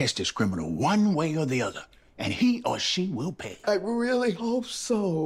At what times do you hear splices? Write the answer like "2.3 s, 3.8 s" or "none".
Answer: none